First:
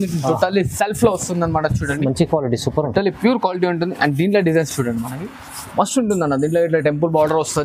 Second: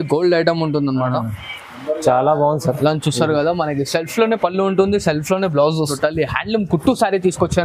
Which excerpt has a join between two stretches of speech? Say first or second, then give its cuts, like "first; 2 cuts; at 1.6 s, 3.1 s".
second; 1 cut; at 5.9 s